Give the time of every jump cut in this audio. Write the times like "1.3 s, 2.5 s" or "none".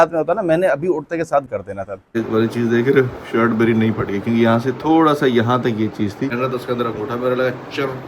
2.2 s, 6.3 s